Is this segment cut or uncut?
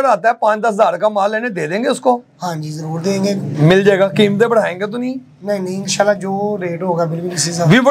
uncut